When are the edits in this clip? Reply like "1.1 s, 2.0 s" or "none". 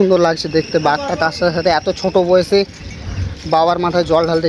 none